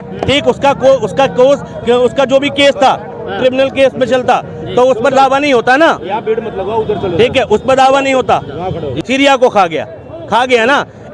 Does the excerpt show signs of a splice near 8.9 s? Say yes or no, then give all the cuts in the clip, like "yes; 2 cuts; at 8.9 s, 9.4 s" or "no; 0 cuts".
yes; 1 cut; at 8.9 s